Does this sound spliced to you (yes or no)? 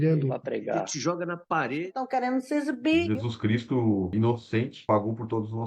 no